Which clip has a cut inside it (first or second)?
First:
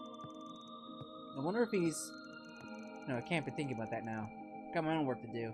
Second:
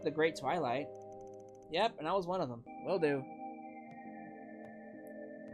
second